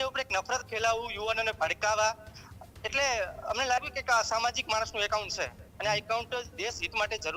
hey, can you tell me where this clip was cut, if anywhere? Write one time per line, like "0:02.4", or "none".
none